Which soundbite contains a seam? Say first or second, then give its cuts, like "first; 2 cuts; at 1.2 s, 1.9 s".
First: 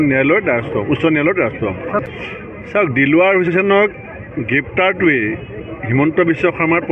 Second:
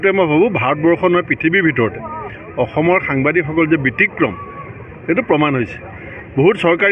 first; 1 cut; at 1.6 s